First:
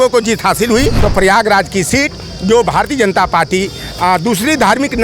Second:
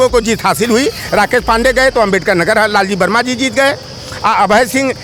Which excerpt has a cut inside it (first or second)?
first